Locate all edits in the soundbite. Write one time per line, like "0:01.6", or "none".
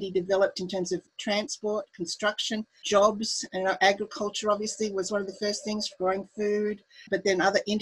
0:01.1
0:02.8
0:07.0